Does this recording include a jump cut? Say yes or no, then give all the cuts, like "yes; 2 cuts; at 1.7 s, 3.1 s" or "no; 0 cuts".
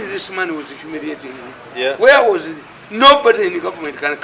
no; 0 cuts